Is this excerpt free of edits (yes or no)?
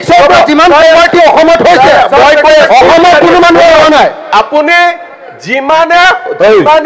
yes